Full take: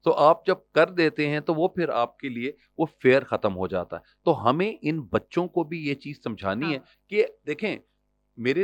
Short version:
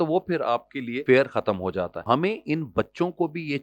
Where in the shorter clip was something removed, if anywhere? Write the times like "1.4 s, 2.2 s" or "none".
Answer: 1.0 s, 2.0 s